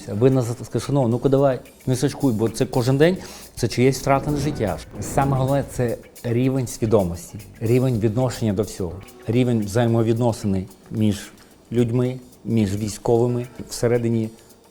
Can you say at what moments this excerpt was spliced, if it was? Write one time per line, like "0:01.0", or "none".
0:04.8
0:13.6